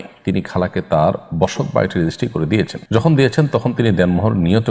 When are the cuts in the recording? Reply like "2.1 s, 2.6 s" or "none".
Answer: 2.8 s